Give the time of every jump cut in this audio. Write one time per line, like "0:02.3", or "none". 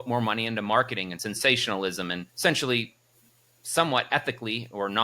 0:01.2
0:02.3